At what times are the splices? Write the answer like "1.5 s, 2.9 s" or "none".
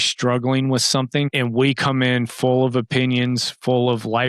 1.3 s